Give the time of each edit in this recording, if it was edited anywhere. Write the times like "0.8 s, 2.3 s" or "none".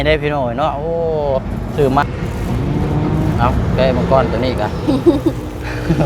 2.0 s